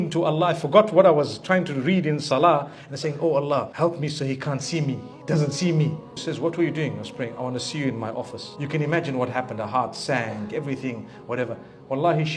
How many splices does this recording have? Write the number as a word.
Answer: three